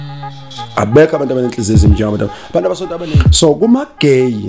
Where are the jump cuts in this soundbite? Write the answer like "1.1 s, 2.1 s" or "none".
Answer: 3.0 s